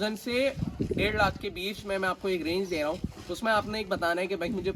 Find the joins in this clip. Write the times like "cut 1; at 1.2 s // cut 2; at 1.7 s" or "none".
none